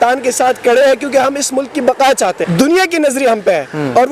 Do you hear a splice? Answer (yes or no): yes